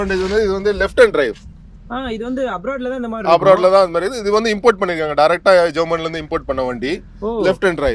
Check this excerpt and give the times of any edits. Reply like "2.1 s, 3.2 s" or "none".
none